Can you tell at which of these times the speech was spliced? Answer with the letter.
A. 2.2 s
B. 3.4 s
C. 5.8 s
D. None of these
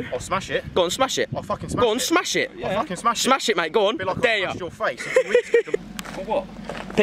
C